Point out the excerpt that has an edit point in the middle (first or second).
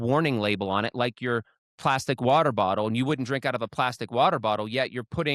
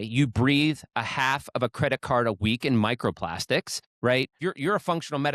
second